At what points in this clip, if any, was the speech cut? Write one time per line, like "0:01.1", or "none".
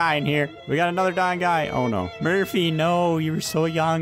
0:02.2